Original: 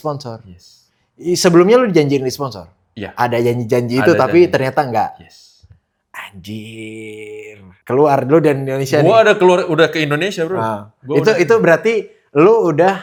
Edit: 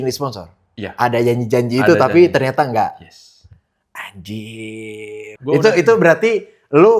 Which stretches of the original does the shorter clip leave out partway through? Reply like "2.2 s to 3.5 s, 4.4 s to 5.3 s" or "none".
7.5 s to 10.9 s